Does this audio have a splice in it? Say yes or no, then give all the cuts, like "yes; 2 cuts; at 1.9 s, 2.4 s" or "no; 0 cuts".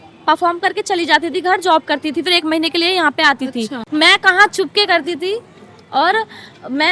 yes; 1 cut; at 3.8 s